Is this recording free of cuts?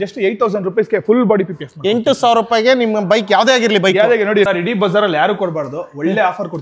no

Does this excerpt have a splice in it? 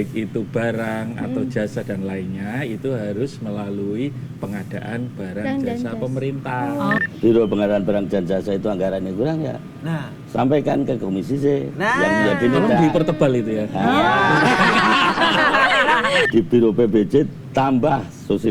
yes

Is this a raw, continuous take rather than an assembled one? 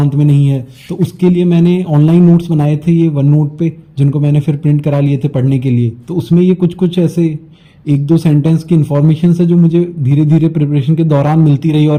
yes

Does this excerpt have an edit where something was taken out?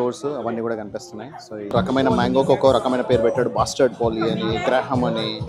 yes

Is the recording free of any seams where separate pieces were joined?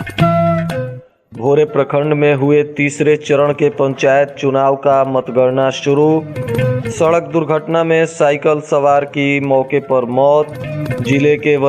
no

